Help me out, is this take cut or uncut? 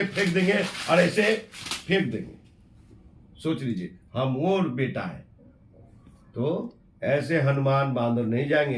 uncut